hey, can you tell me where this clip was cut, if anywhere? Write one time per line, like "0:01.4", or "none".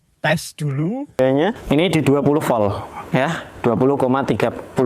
0:01.2